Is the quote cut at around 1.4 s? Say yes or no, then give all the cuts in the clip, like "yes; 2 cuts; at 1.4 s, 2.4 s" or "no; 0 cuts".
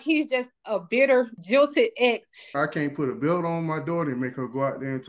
yes; 2 cuts; at 1.4 s, 2.5 s